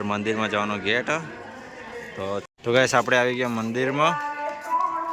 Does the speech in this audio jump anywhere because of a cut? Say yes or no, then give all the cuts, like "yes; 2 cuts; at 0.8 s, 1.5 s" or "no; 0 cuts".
yes; 1 cut; at 2.4 s